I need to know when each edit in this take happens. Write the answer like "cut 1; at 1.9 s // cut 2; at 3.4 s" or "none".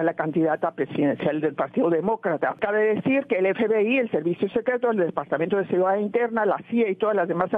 cut 1; at 2.6 s